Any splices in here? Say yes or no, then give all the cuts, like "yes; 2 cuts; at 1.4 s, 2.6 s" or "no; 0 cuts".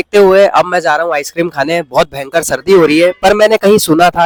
no; 0 cuts